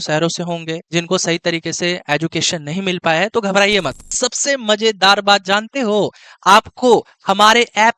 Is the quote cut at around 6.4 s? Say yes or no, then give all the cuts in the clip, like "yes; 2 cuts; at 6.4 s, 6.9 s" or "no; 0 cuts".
no; 1 cut; at 4.1 s